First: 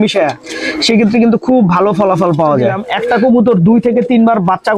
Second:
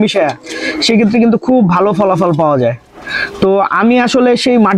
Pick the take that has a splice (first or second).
first